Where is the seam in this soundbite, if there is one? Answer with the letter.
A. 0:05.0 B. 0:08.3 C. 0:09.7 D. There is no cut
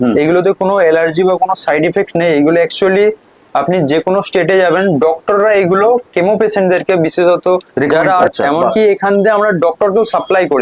B